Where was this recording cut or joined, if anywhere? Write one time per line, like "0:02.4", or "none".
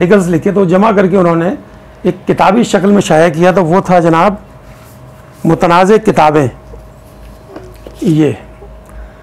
none